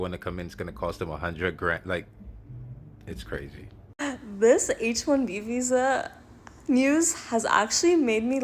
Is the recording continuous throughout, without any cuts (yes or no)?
yes